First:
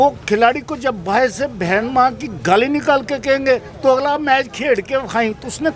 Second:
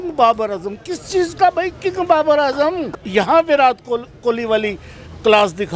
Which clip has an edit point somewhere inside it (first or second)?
second